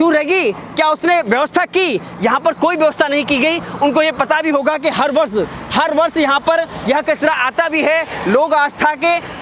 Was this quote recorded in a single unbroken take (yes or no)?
yes